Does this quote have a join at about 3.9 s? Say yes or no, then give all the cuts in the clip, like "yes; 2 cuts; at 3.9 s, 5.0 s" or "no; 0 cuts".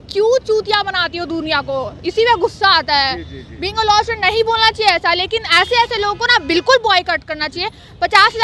no; 0 cuts